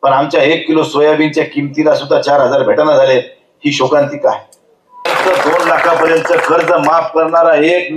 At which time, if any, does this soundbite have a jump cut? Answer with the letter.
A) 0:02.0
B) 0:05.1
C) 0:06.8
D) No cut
B